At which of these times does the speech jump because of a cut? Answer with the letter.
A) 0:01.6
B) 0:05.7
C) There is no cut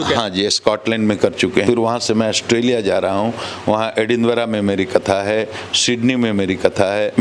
A